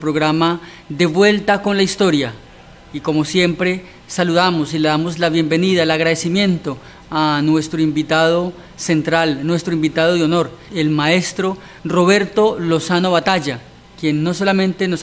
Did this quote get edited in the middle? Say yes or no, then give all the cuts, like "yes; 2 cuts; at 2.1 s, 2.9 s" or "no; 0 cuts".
no; 0 cuts